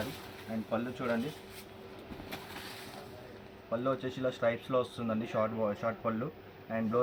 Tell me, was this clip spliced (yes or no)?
no